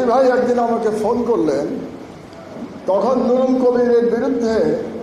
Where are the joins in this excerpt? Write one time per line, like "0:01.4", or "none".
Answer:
none